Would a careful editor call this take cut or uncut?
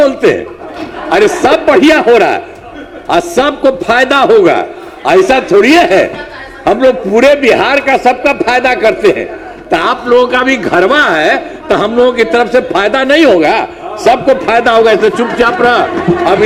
uncut